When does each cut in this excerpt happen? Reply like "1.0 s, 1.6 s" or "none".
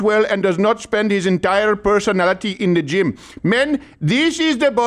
none